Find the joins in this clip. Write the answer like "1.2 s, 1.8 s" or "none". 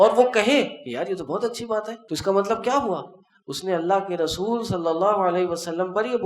2.0 s